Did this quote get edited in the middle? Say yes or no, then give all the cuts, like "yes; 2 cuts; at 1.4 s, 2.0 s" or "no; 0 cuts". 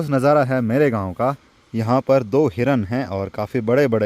yes; 1 cut; at 1.5 s